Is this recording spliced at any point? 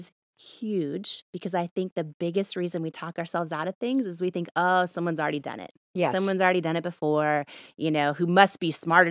no; 0 cuts

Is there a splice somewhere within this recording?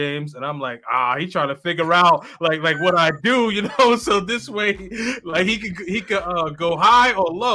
no; 0 cuts

